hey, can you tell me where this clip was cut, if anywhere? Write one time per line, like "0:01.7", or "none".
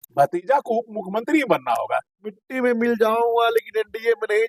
none